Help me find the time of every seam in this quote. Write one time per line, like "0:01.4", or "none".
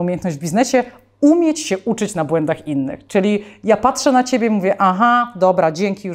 none